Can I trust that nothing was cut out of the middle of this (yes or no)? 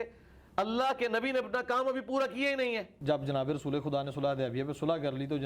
no